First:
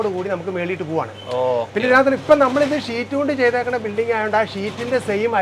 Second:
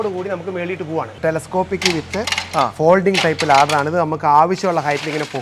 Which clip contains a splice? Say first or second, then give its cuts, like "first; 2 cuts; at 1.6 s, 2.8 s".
second; 1 cut; at 1.1 s